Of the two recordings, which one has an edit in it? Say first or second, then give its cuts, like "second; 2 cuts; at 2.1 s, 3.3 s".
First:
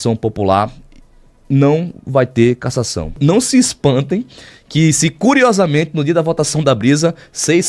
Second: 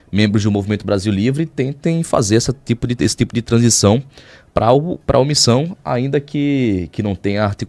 first; 1 cut; at 3.2 s